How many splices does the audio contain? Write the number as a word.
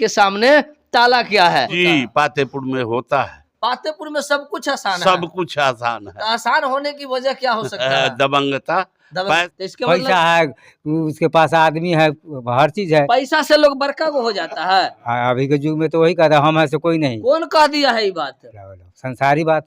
two